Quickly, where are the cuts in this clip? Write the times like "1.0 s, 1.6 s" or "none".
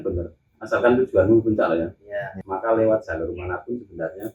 2.4 s